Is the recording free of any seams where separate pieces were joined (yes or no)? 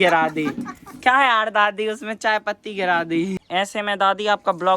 no